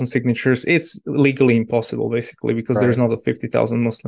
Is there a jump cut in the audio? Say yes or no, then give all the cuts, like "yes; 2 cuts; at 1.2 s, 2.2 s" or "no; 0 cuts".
no; 0 cuts